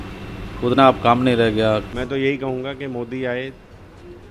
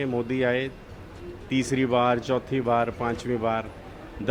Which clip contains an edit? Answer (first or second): first